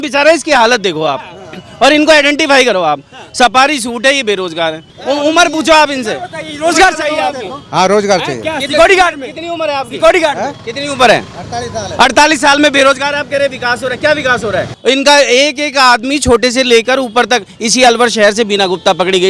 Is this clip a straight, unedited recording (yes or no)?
no